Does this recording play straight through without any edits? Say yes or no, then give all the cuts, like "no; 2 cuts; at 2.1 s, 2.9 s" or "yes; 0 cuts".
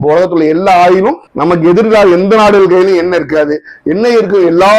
yes; 0 cuts